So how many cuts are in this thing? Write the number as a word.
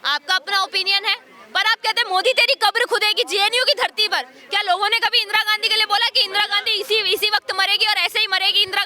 zero